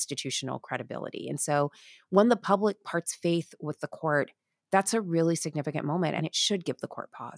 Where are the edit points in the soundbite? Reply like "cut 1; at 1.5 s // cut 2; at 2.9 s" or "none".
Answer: cut 1; at 6.2 s